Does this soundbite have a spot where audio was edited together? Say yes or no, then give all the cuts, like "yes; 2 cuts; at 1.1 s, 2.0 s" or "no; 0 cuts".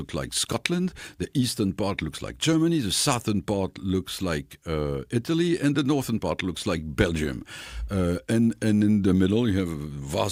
no; 0 cuts